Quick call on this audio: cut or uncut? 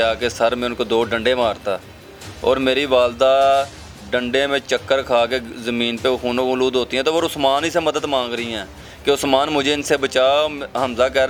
uncut